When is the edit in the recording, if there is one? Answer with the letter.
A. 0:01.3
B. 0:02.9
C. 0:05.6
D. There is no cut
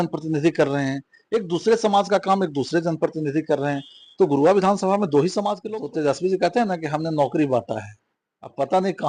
C